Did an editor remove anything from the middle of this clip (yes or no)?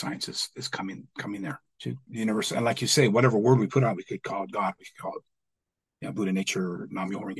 yes